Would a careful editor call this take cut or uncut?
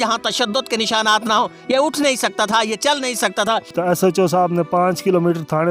cut